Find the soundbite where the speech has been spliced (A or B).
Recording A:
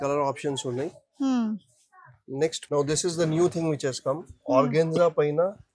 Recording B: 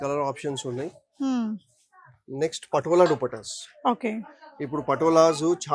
A